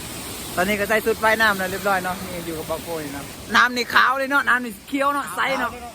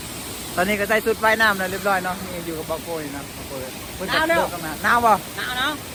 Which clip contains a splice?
first; 1 cut; at 3.4 s

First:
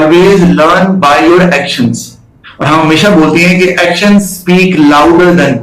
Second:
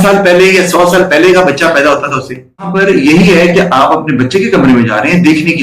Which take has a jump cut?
second; 1 cut; at 2.7 s

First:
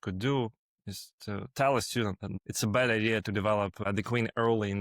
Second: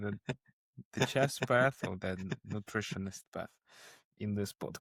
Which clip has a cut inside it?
first; 2 cuts; at 2.3 s, 3.8 s

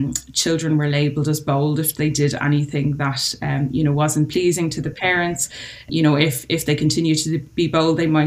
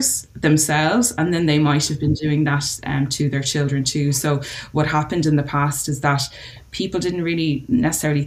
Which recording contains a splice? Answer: first; 1 cut; at 5.9 s

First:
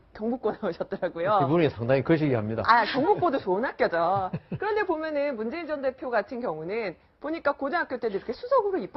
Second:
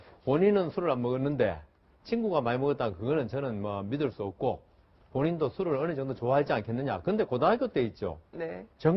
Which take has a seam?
first; 1 cut; at 7.7 s

